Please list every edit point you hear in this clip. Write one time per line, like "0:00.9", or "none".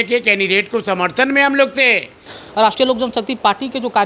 0:02.4